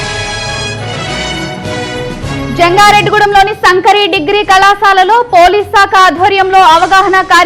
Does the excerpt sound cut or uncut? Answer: uncut